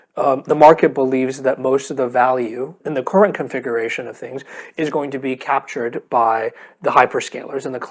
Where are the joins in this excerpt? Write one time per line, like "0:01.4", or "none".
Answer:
0:02.8